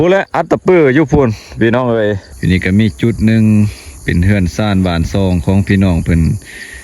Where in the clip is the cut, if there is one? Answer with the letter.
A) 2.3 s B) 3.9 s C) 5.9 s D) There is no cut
A